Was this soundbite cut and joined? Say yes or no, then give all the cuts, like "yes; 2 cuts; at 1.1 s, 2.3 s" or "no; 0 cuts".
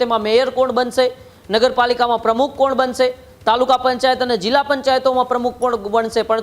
no; 0 cuts